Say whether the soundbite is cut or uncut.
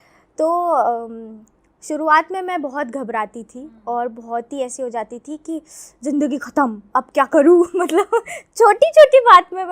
uncut